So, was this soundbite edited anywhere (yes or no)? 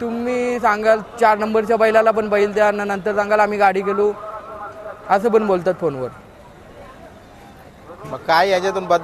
no